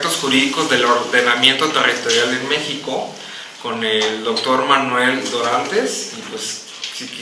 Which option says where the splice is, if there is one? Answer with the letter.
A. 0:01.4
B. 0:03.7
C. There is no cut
B